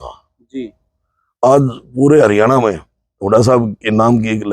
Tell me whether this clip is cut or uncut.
uncut